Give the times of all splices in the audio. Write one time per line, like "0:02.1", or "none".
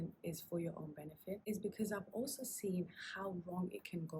0:01.4